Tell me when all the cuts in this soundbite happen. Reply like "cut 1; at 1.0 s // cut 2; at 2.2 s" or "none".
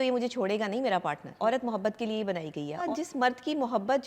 cut 1; at 1.3 s // cut 2; at 2.8 s